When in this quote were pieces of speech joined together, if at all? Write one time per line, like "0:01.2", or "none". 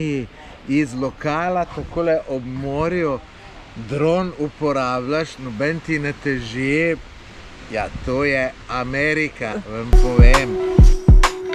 0:10.0